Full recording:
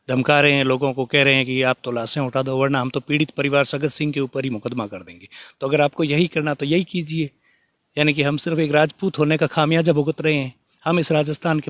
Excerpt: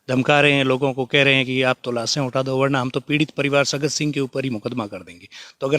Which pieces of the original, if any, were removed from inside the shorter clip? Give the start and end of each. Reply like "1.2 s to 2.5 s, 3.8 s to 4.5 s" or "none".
none